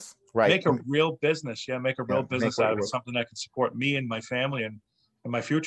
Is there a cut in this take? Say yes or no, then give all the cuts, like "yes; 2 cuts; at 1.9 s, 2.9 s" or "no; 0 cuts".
no; 0 cuts